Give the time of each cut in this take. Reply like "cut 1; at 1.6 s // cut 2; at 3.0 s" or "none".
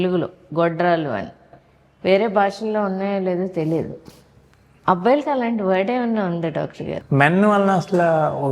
cut 1; at 6.9 s